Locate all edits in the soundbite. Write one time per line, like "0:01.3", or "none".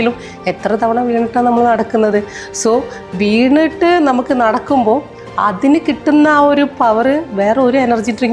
none